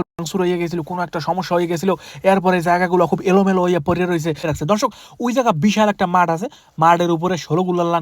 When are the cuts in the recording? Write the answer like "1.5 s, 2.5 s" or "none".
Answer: 4.5 s